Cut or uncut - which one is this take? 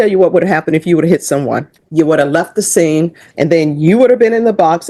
cut